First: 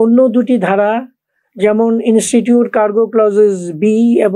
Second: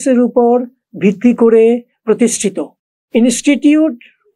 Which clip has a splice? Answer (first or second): second